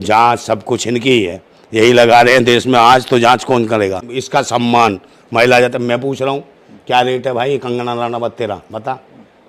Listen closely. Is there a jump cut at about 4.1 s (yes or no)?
yes